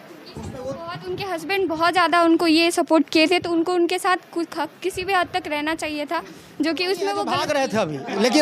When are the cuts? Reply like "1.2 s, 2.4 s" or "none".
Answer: 7.3 s